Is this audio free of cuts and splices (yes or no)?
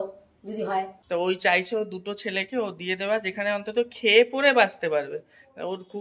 no